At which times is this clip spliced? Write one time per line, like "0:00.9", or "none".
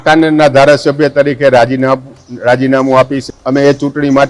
0:03.2

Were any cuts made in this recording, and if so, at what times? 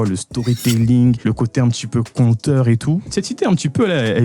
0:01.2
0:03.1

